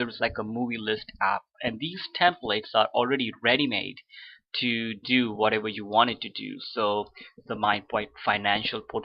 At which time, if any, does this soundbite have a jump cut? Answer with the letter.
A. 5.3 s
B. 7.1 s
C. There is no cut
A